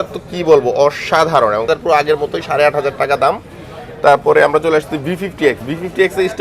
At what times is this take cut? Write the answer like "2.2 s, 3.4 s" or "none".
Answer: 1.7 s